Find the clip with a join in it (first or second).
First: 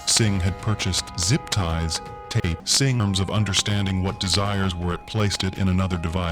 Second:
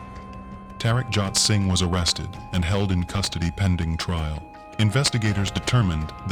first